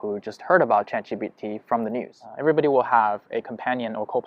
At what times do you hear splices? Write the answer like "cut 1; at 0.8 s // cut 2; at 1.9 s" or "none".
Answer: cut 1; at 2.2 s